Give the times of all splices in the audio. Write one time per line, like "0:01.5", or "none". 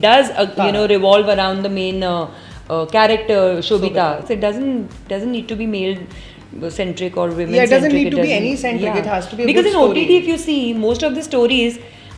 0:04.2